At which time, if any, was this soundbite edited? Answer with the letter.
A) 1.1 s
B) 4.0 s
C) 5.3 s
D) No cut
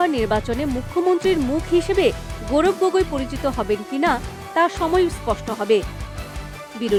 D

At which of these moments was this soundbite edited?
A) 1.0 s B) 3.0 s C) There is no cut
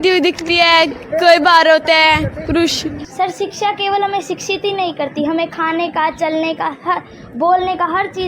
B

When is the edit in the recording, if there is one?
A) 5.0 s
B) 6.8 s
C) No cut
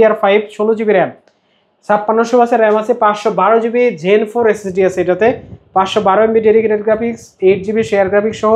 C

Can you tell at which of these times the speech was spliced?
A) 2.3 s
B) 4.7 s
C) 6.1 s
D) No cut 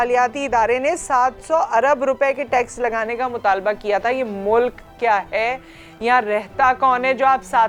D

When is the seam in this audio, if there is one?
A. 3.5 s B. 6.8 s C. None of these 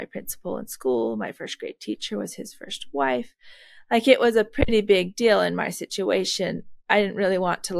C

